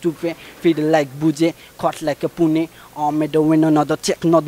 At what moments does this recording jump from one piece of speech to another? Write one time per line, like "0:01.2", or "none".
none